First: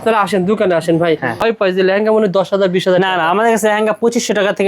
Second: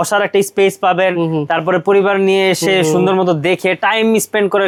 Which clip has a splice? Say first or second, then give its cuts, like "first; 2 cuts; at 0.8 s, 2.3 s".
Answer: first; 1 cut; at 1.4 s